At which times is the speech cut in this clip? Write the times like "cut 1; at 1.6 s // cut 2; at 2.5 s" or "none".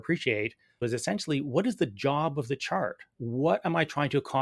cut 1; at 0.8 s // cut 2; at 3.2 s